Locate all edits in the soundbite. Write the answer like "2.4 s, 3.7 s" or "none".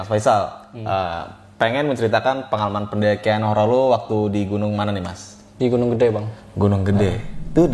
none